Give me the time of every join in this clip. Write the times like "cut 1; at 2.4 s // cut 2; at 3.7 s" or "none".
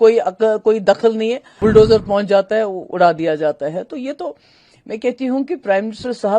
cut 1; at 1.5 s

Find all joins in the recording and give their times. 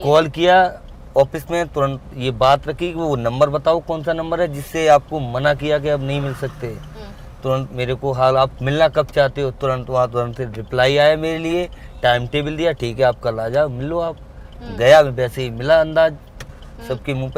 none

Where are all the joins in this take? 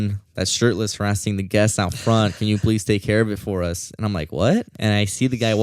cut 1; at 4.7 s

